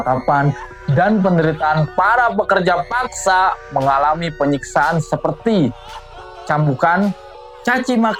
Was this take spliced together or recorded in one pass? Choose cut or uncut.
uncut